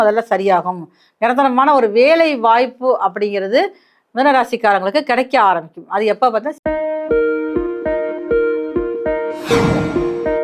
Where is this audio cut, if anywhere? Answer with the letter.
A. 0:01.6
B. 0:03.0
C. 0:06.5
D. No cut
C